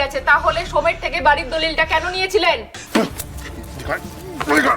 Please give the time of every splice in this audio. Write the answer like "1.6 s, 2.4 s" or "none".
2.8 s